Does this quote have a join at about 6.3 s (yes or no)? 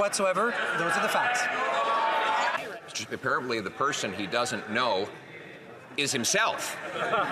no